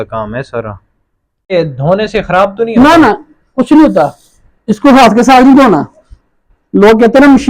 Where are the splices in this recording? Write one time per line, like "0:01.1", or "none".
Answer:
0:01.5

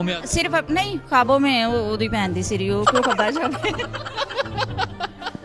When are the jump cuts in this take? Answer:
none

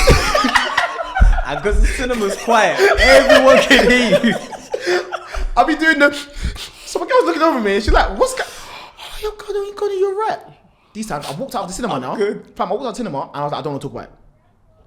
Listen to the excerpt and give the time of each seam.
none

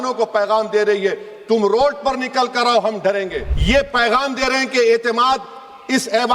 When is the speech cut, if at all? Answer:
0:03.5

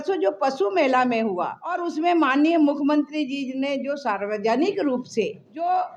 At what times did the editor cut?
none

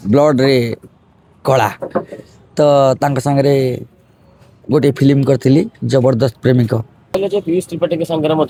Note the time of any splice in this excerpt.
none

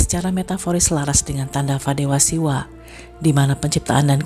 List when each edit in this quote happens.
none

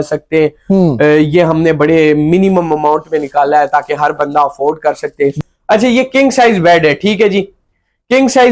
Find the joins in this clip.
0:05.4

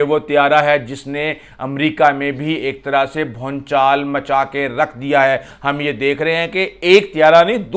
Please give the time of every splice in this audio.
0:05.5

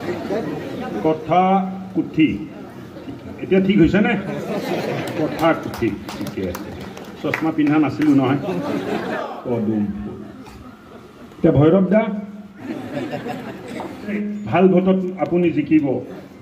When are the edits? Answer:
0:09.2
0:12.6
0:14.1

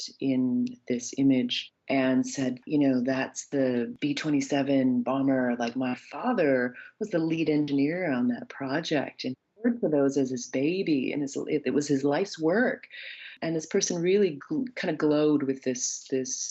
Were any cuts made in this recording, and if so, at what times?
none

